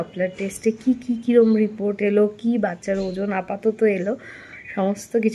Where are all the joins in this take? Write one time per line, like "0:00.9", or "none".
none